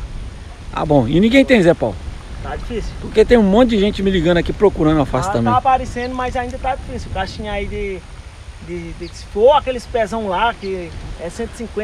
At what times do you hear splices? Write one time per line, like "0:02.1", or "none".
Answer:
none